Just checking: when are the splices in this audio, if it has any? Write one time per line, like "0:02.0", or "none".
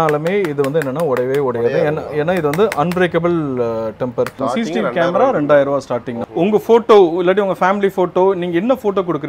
0:04.3
0:06.2